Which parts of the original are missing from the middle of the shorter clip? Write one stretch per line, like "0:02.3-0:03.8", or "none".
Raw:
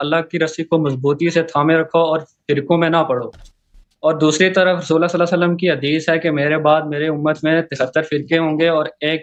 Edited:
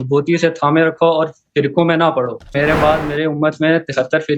0:03.5-0:06.4